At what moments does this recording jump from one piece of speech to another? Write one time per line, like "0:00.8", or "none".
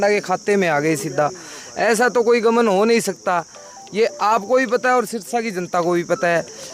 none